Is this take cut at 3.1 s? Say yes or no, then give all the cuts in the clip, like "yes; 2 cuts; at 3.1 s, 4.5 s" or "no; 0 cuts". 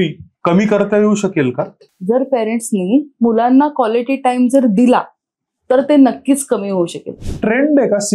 no; 2 cuts; at 1.8 s, 7.1 s